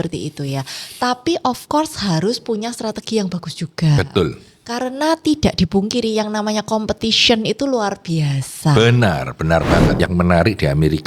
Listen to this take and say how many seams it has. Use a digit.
1